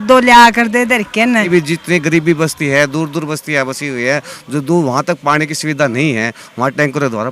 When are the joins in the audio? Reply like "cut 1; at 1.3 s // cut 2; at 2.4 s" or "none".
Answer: cut 1; at 1.5 s